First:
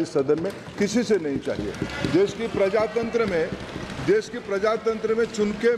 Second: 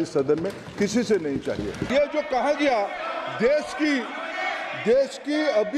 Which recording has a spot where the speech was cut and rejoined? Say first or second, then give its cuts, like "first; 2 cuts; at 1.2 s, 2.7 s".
second; 1 cut; at 1.8 s